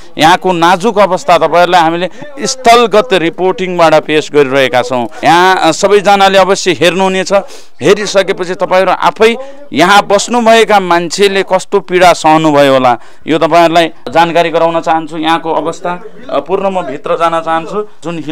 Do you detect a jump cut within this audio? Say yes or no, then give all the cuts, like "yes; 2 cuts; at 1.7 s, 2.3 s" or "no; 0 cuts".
no; 0 cuts